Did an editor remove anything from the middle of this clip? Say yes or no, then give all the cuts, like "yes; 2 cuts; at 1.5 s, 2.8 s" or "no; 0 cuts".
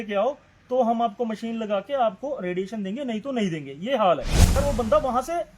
yes; 1 cut; at 4.6 s